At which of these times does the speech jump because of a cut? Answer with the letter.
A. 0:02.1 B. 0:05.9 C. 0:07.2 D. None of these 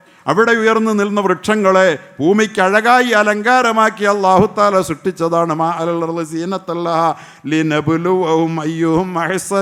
D